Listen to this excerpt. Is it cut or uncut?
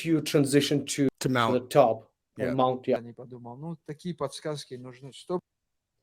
cut